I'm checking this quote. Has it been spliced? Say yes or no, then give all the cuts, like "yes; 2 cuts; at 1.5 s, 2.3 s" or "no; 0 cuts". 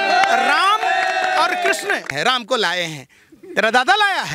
yes; 1 cut; at 2.4 s